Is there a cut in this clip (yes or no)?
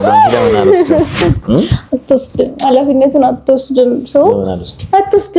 no